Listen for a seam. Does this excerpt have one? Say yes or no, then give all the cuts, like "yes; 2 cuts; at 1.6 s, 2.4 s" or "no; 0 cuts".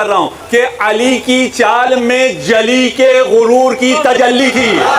no; 0 cuts